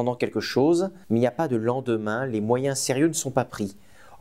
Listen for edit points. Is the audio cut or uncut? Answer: cut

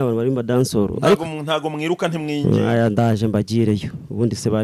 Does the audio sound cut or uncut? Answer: uncut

